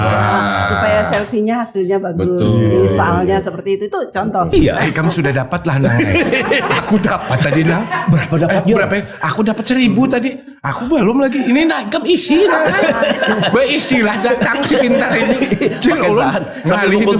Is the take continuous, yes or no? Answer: no